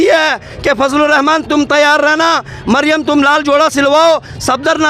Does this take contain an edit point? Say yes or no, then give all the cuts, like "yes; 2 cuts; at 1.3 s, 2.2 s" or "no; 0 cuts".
no; 0 cuts